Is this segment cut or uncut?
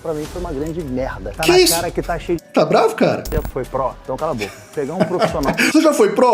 cut